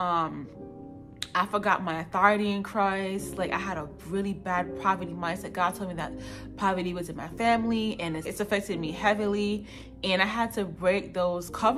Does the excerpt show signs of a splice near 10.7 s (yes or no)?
no